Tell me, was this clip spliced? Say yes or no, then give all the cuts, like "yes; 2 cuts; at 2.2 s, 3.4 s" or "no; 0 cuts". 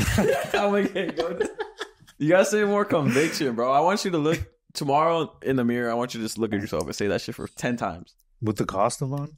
yes; 1 cut; at 2.0 s